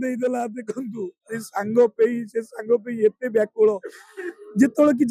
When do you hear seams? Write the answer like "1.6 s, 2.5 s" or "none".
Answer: none